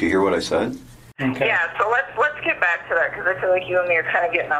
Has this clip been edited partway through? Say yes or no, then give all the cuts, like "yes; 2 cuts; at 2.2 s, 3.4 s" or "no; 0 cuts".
yes; 1 cut; at 1.0 s